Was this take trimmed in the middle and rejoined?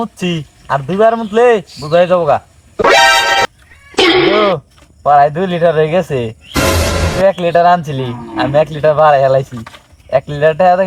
no; 0 cuts

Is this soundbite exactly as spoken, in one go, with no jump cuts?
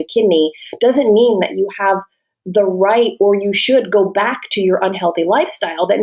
yes; 0 cuts

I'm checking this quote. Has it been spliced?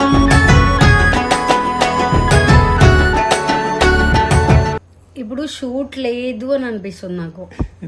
yes; 1 cut; at 5.0 s

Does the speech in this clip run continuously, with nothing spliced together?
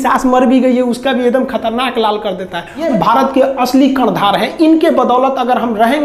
no; 1 cut; at 2.9 s

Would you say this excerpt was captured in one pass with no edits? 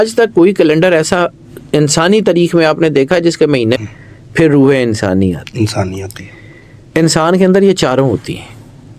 no; 1 cut; at 3.8 s

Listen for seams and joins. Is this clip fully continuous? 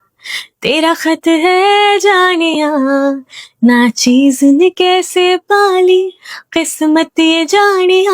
yes; 0 cuts

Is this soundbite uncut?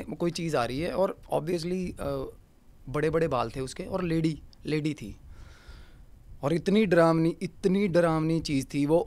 yes; 0 cuts

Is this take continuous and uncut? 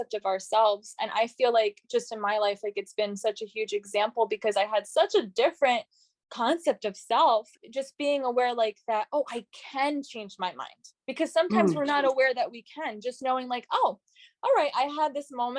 no; 1 cut; at 7.6 s

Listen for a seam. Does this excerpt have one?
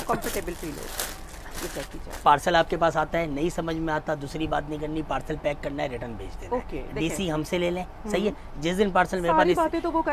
no; 0 cuts

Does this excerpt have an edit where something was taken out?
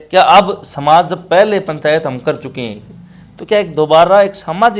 no; 0 cuts

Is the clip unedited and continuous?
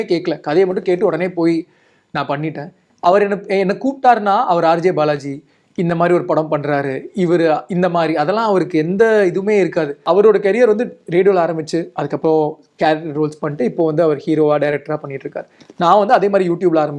no; 2 cuts; at 2.8 s, 10.0 s

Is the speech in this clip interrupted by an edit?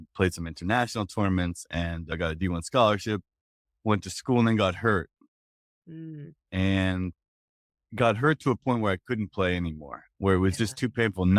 no; 0 cuts

